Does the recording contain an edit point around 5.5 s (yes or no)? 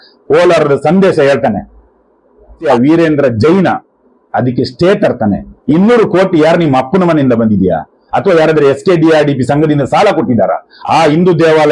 yes